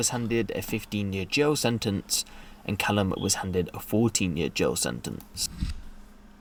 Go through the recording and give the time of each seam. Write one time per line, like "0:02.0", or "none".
none